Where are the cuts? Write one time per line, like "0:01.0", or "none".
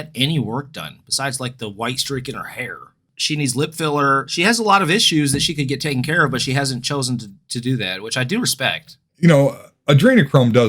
0:03.1